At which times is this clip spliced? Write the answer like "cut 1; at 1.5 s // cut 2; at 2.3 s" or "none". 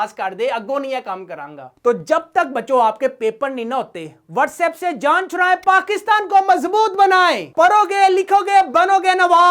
cut 1; at 1.6 s // cut 2; at 7.5 s

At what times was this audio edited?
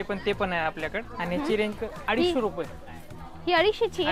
cut 1; at 1.1 s // cut 2; at 1.9 s

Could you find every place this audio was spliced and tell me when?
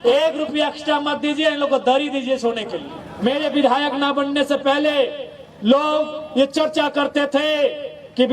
cut 1; at 3.0 s

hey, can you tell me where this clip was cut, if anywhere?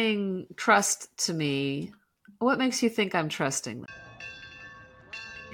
cut 1; at 3.7 s

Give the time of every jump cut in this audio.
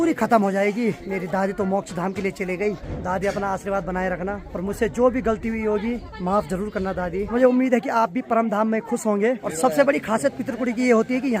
cut 1; at 1.0 s // cut 2; at 2.9 s // cut 3; at 4.5 s // cut 4; at 6.1 s // cut 5; at 7.3 s // cut 6; at 9.5 s

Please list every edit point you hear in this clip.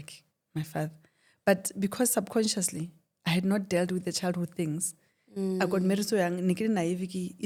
none

